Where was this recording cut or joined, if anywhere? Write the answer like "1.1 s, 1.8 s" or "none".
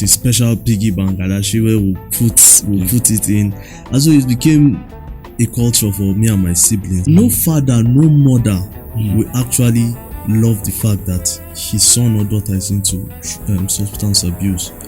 7.0 s